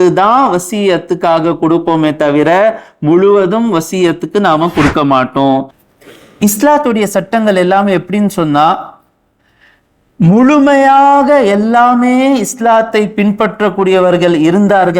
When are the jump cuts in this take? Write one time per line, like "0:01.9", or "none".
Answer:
0:05.8